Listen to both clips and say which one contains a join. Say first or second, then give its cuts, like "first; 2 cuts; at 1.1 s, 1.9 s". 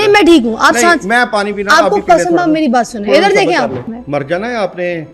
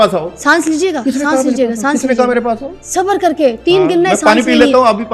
first; 1 cut; at 3.9 s